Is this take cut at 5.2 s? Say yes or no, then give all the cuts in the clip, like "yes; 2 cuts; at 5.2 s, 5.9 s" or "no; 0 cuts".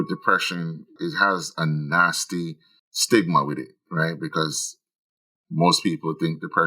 no; 1 cut; at 0.9 s